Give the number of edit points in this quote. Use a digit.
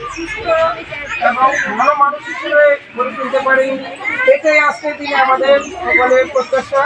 0